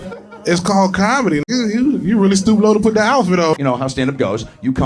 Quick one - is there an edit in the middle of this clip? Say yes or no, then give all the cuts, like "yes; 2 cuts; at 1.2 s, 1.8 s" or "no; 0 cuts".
yes; 2 cuts; at 1.5 s, 3.5 s